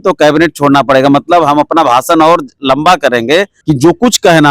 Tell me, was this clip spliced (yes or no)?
yes